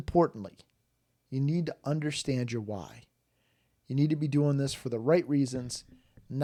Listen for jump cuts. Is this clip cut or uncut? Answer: uncut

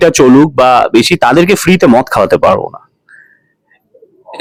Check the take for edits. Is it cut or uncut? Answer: uncut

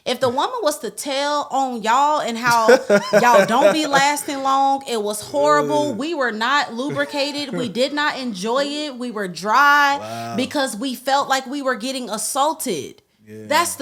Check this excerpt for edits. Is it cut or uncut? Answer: uncut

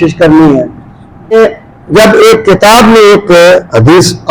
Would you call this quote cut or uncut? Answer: cut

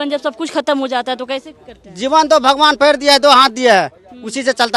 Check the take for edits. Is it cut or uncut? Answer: uncut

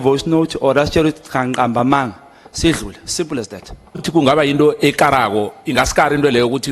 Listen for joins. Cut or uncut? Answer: cut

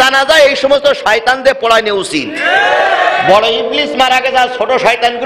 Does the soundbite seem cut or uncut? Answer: uncut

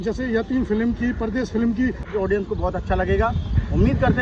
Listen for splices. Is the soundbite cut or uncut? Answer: cut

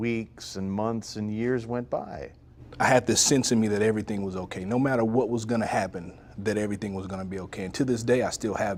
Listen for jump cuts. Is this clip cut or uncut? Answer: uncut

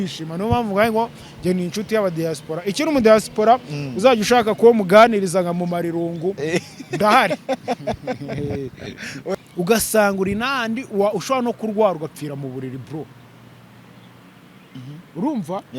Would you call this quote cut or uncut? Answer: cut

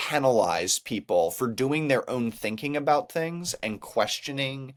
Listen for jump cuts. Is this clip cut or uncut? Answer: uncut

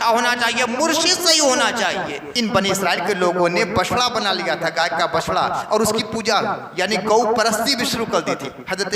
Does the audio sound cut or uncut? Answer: cut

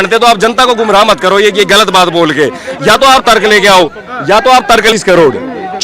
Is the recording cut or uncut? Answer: cut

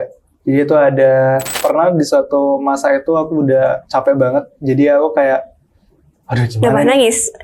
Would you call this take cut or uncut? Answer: cut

